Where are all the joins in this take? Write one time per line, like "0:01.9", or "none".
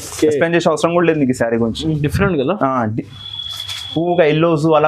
0:02.1